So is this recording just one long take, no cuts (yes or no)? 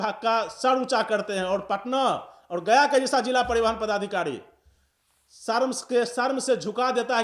yes